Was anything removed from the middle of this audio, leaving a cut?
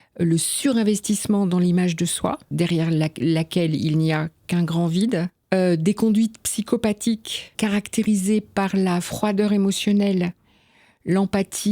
yes; 3 cuts; at 2.5 s, 5.4 s, 7.5 s

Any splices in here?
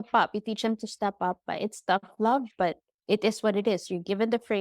yes; 1 cut; at 2.9 s

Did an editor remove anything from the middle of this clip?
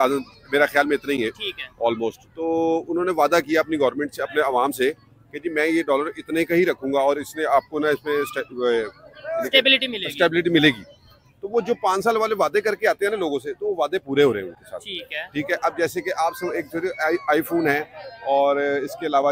no; 0 cuts

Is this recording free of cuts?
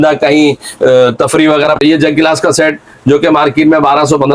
no; 1 cut; at 1.8 s

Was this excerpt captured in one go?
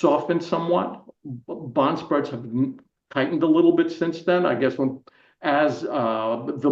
yes; 0 cuts

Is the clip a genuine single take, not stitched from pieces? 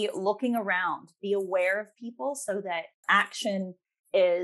yes; 0 cuts

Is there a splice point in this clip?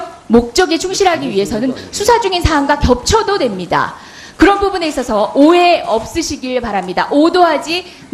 yes; 1 cut; at 3.0 s

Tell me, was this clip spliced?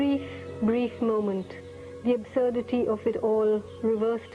yes; 1 cut; at 1.0 s

